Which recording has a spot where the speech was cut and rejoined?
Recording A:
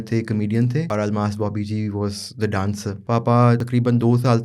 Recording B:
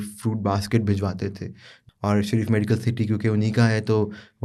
A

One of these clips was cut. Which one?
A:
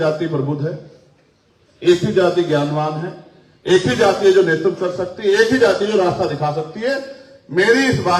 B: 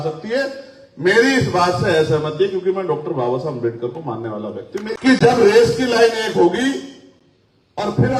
B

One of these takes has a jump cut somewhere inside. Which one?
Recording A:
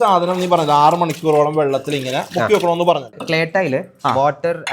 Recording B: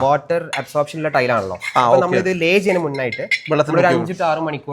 A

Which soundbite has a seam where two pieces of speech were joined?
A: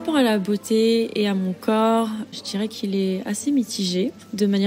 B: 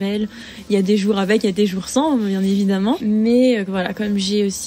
B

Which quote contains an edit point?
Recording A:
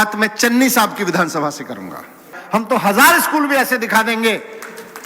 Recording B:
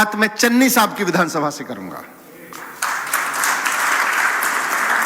A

